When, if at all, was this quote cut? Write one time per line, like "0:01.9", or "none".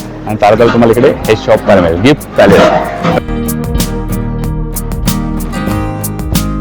0:03.2